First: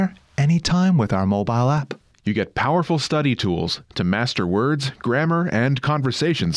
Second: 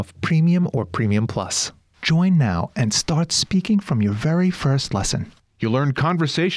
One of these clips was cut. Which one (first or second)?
second